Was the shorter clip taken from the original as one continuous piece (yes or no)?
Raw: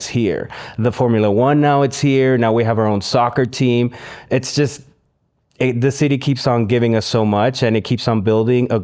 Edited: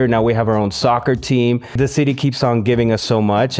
no